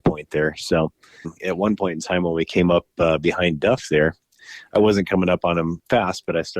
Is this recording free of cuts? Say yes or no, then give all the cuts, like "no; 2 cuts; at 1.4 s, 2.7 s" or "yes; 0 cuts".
no; 2 cuts; at 1.3 s, 4.3 s